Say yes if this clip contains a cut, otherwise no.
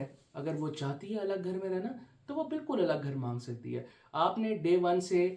yes